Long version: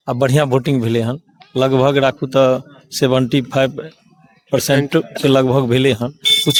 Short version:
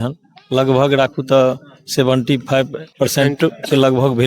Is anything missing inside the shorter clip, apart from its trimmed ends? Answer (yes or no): yes